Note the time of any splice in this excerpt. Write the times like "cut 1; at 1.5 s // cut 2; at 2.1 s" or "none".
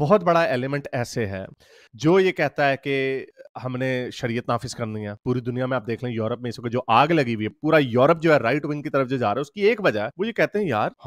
none